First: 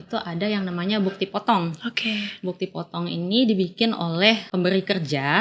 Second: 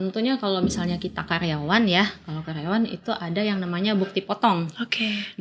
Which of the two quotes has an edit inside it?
first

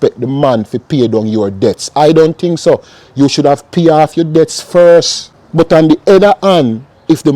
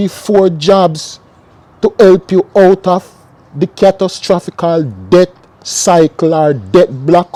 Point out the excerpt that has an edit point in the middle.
first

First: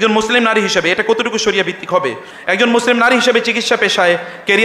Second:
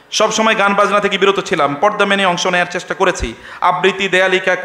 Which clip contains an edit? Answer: first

